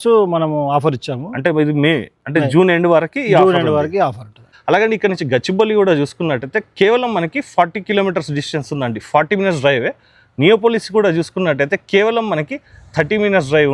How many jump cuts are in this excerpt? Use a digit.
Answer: 1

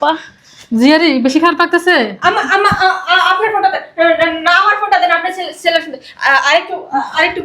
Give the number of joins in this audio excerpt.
0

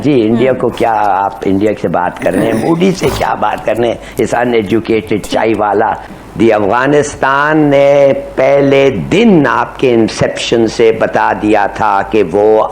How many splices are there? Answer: 1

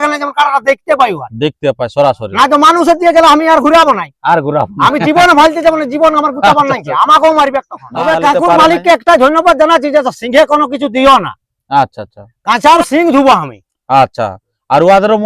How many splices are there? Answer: 2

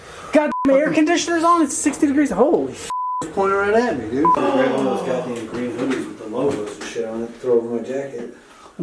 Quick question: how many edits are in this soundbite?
1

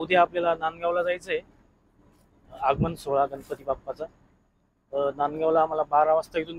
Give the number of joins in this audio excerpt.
0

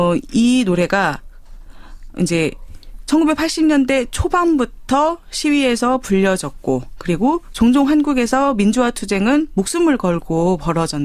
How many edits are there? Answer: 1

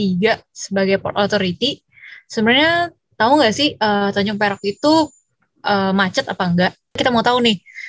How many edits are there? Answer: 1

